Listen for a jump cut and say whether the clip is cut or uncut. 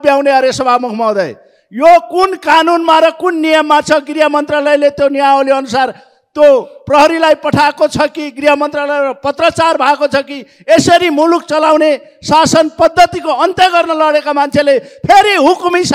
uncut